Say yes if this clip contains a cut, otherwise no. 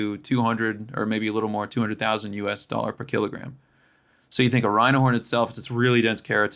no